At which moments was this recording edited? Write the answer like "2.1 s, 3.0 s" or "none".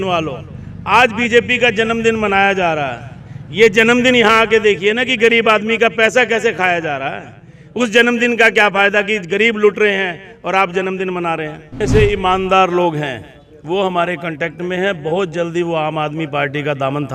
11.7 s